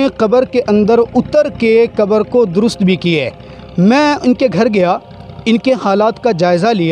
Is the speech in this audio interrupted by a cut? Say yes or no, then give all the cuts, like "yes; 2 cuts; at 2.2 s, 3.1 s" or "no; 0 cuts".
no; 0 cuts